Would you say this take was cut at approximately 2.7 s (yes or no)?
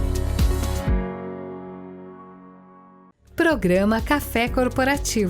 yes